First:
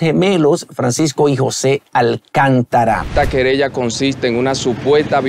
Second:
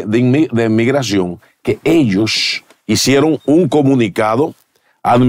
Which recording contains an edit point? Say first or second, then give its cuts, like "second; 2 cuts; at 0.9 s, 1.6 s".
first; 1 cut; at 3.1 s